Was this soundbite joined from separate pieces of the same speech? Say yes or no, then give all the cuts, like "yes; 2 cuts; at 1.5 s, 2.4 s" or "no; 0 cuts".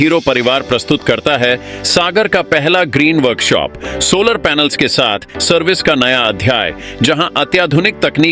no; 0 cuts